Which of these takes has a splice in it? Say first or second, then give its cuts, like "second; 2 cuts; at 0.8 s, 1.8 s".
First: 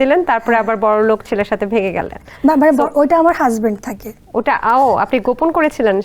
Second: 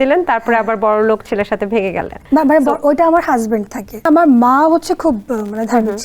second; 2 cuts; at 2.1 s, 4.1 s